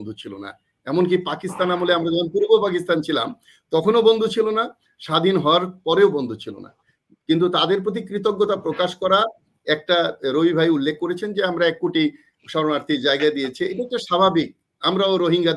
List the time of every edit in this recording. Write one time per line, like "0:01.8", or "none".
none